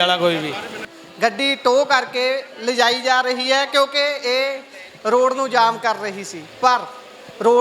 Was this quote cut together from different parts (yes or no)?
yes